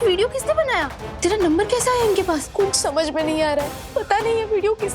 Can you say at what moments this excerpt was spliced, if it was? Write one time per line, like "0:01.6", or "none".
0:01.0
0:02.5
0:03.8